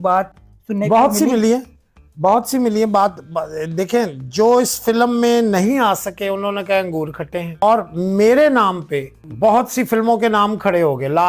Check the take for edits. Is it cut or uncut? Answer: cut